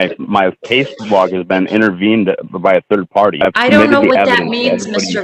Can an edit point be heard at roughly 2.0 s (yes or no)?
no